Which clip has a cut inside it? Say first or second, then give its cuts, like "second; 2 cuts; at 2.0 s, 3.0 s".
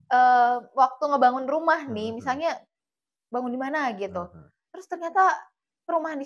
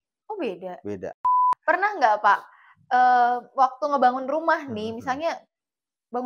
second; 1 cut; at 1.2 s